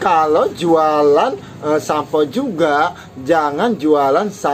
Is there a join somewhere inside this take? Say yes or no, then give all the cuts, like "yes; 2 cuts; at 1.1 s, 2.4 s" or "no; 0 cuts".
no; 0 cuts